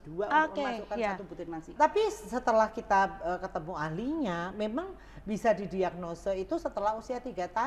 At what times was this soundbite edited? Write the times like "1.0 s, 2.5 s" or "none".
1.7 s